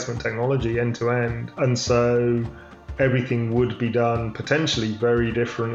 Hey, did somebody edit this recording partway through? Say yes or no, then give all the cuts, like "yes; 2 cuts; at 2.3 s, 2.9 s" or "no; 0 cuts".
no; 0 cuts